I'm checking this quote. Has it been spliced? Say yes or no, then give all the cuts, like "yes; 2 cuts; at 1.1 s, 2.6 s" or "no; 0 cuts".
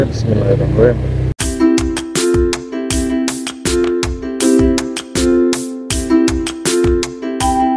yes; 1 cut; at 1.4 s